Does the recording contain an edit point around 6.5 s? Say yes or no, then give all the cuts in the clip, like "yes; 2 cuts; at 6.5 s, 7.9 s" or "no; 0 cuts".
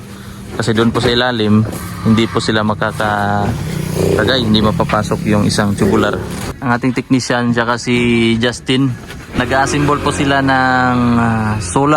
yes; 2 cuts; at 6.5 s, 9.4 s